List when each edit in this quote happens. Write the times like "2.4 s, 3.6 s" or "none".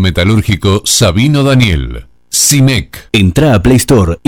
2.9 s